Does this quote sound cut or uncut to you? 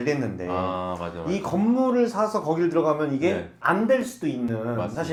uncut